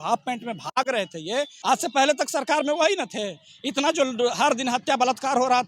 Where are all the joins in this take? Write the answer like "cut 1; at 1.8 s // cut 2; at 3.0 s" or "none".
cut 1; at 1.5 s